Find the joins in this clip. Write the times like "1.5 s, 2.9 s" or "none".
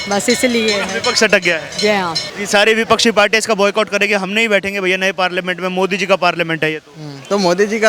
2.3 s